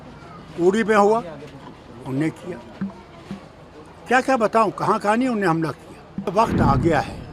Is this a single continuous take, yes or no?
no